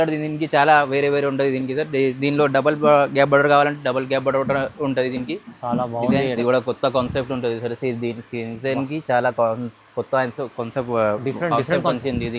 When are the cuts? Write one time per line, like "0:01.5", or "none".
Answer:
0:06.4